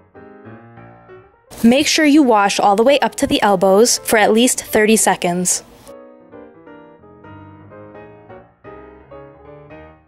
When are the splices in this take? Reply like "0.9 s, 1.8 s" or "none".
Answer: 1.4 s, 5.5 s